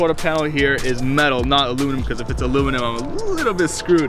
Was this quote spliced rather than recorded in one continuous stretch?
no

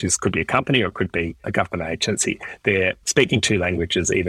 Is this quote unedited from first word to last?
no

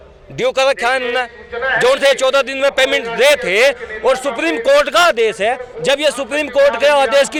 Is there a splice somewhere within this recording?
no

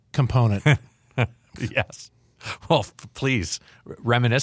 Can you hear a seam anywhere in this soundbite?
yes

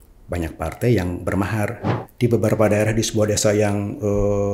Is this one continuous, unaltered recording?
no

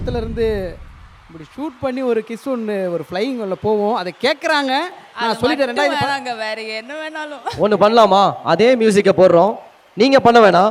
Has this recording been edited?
no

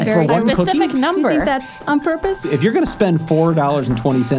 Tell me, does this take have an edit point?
yes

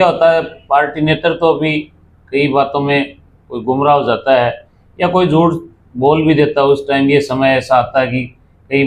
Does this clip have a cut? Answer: no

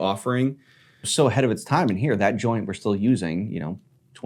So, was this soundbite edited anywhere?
yes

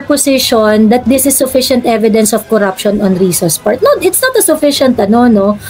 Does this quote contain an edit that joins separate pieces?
no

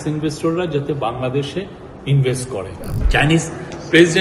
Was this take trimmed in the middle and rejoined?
yes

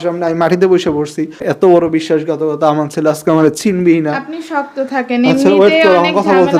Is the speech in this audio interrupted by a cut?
yes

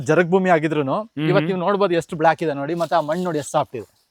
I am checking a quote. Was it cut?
no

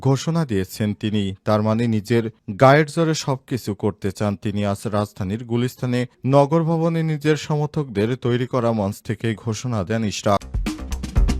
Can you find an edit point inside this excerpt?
yes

